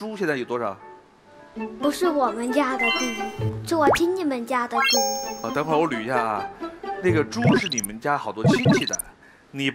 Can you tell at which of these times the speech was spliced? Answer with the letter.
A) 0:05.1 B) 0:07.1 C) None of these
B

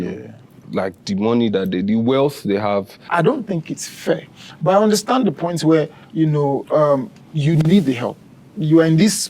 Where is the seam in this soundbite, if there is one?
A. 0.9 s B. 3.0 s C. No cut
B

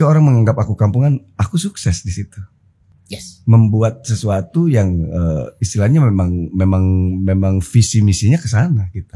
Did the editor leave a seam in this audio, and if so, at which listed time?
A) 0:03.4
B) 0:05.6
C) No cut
C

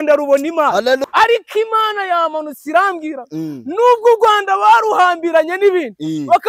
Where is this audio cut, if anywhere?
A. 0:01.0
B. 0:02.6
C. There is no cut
A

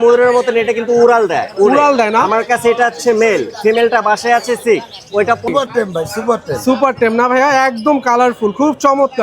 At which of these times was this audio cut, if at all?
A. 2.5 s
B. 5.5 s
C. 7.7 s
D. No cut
B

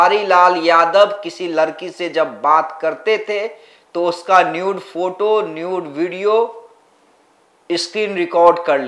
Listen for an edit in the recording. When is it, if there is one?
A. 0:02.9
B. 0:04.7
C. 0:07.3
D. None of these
D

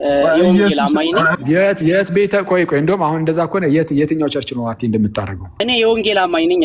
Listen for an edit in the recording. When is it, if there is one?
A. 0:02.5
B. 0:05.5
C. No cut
B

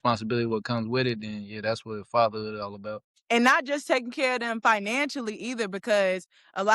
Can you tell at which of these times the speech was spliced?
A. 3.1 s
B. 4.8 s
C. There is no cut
A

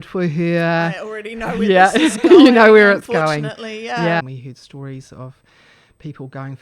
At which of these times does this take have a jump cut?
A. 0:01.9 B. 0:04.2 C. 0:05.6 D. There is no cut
B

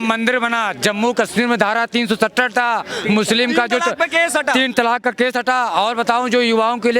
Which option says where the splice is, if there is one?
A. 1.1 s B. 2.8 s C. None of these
C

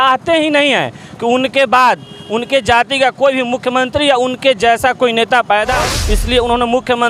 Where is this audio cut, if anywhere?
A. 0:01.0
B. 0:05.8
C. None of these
B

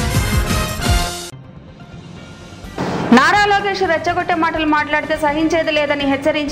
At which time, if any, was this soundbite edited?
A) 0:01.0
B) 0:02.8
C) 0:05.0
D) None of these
B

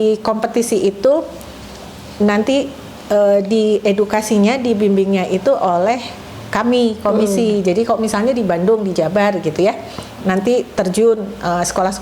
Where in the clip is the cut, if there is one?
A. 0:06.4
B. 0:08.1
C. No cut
C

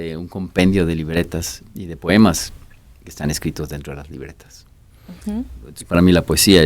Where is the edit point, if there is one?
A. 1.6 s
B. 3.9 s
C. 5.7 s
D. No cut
C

